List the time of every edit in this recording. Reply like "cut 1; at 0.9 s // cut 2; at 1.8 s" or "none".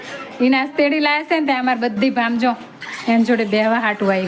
none